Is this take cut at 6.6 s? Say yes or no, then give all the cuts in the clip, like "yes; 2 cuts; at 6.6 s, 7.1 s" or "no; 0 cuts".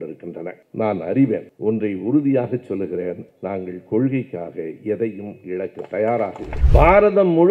yes; 1 cut; at 6.6 s